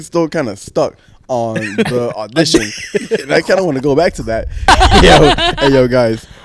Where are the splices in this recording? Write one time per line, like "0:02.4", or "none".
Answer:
0:04.7